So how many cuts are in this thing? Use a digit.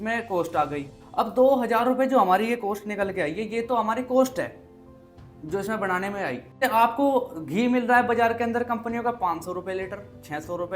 2